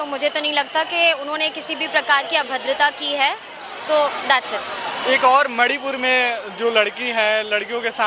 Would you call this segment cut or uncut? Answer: uncut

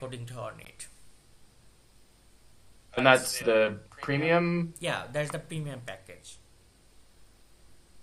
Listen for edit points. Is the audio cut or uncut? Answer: cut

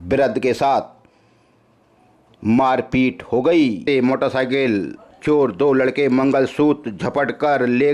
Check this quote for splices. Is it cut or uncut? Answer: cut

